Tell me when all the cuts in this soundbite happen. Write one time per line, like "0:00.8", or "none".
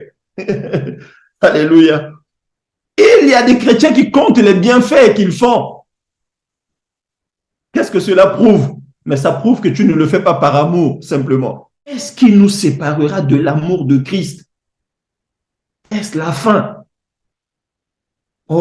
0:12.1